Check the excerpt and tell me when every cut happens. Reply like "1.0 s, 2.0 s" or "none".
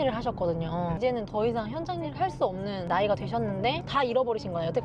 1.0 s, 2.8 s, 3.8 s